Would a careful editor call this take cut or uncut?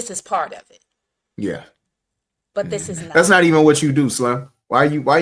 cut